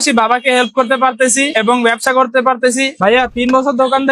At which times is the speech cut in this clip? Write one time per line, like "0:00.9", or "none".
0:02.9